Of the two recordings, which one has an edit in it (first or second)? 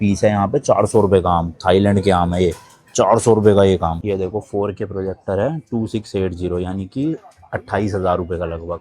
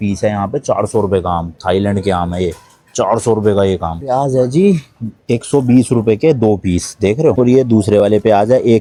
first